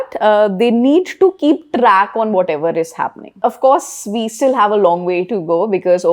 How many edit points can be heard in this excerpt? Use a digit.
1